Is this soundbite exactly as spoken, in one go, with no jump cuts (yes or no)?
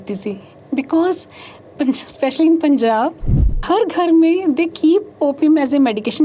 no